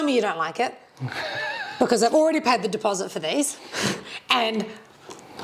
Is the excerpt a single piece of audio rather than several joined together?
yes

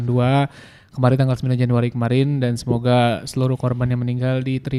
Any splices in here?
no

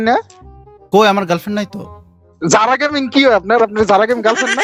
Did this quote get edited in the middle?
no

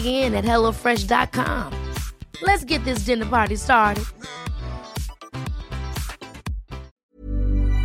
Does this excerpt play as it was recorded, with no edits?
no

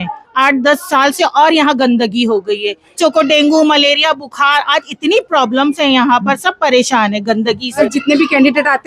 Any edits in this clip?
yes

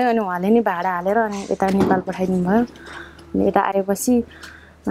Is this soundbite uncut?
yes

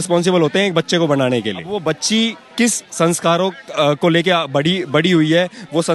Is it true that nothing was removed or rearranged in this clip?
no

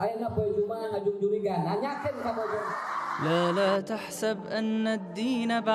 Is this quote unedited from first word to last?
no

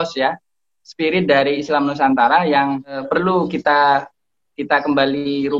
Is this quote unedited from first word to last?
no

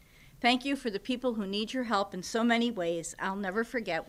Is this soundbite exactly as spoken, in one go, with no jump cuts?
yes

